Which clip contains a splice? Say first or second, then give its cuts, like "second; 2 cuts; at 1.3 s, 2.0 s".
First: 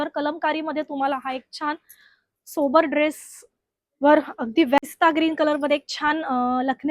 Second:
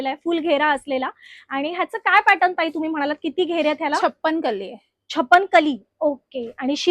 first; 1 cut; at 4.8 s